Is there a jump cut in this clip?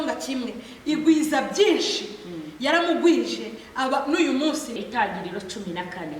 yes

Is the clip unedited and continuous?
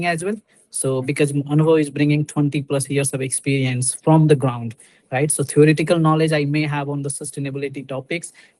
yes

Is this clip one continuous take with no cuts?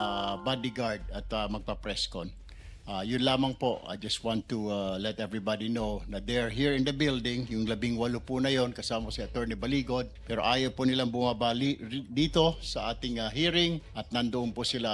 no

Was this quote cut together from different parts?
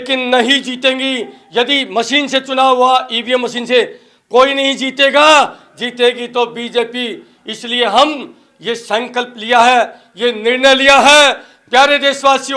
no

